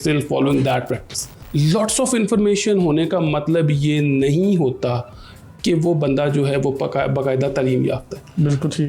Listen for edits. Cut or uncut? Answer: cut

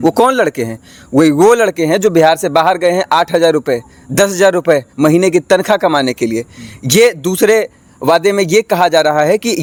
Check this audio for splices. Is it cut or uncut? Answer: uncut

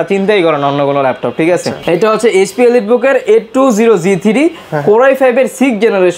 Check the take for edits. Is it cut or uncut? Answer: uncut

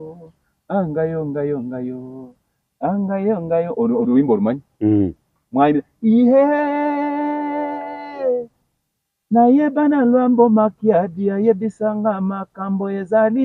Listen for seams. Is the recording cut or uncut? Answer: uncut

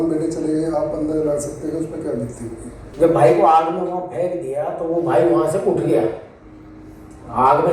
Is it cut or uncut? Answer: cut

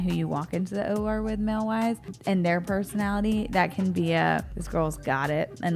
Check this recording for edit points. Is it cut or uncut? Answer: cut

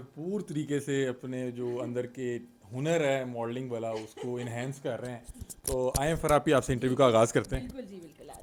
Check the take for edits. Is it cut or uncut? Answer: uncut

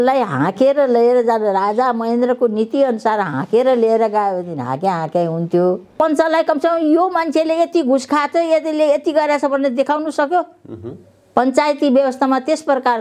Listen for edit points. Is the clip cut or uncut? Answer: cut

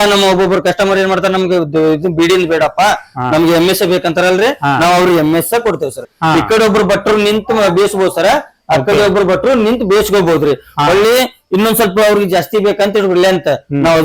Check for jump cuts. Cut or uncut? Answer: cut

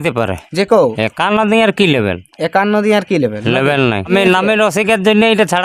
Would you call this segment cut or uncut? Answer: cut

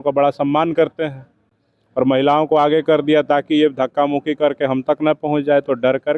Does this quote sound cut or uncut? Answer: uncut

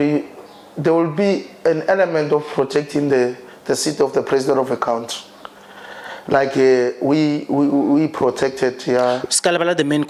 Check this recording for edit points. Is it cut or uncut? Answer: uncut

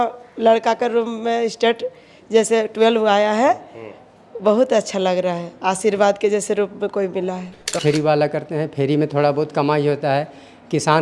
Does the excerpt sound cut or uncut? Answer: cut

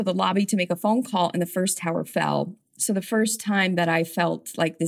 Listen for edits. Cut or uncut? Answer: uncut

